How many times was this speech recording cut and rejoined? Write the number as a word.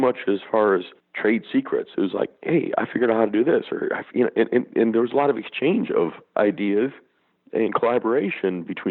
two